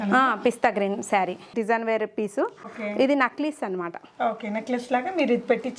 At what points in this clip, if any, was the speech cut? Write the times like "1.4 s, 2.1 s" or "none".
1.5 s, 2.6 s